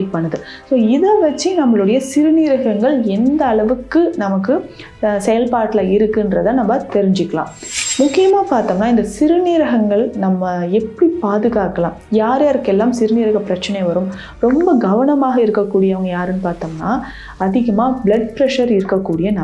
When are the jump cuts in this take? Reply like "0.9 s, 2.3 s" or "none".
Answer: none